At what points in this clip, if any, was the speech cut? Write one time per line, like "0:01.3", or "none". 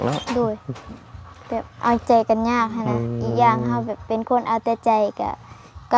none